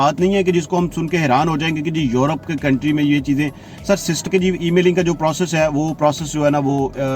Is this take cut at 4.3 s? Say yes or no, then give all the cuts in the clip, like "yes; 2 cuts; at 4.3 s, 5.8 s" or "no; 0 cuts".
yes; 1 cut; at 4.3 s